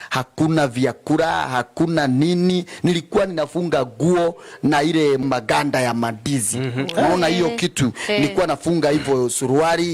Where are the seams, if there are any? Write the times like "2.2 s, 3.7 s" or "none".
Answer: none